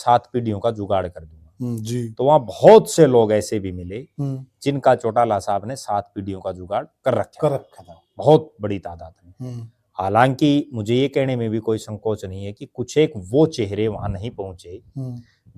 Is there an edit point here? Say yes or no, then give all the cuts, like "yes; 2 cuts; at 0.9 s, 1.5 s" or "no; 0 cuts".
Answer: no; 0 cuts